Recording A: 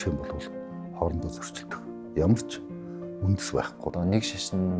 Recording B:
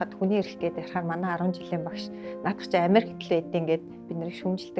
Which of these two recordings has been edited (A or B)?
A